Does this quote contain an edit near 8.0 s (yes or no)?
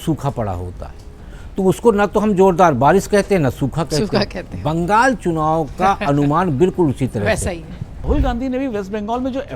yes